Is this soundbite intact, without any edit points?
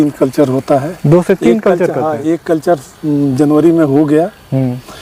yes; 0 cuts

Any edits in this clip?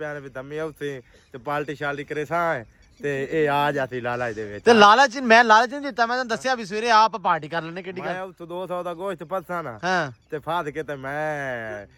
no; 0 cuts

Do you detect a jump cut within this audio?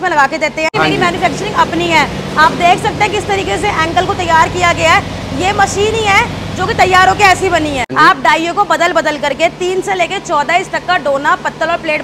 yes; 2 cuts; at 0.7 s, 7.8 s

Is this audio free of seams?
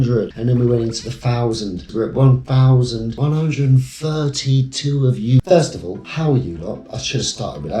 no; 3 cuts; at 1.9 s, 3.2 s, 5.4 s

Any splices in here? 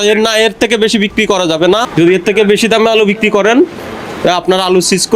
yes; 1 cut; at 1.9 s

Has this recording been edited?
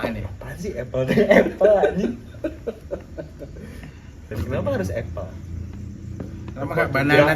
yes; 1 cut; at 4.3 s

